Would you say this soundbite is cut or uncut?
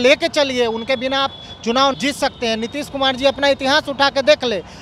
cut